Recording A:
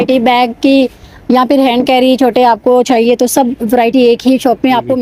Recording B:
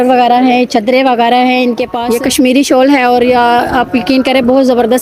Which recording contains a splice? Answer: B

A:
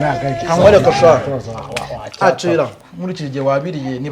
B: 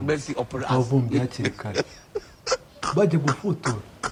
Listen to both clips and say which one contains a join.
A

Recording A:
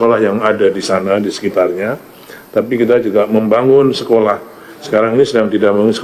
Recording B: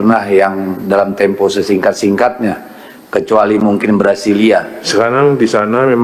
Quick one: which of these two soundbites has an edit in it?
B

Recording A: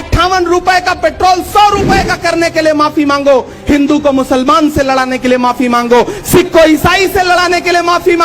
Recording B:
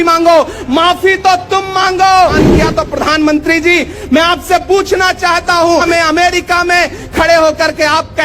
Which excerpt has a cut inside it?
B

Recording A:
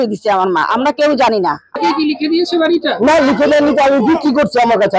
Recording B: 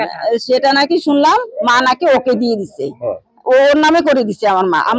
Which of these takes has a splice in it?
A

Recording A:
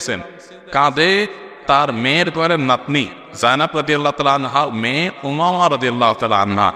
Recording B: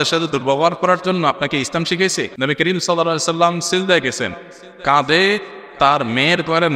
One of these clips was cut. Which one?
B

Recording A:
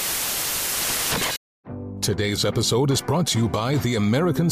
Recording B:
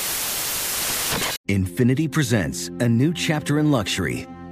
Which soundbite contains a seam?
B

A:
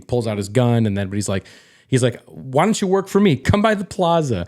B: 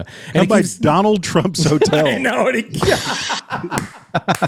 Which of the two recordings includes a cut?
A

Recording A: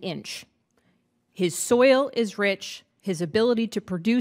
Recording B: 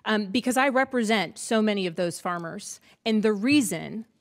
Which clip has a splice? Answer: B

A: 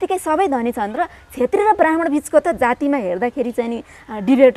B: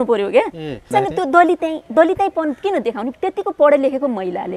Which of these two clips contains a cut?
B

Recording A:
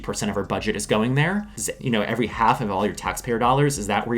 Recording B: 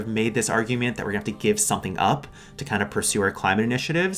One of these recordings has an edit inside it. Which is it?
A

